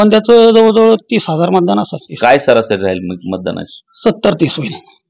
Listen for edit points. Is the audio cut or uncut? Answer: cut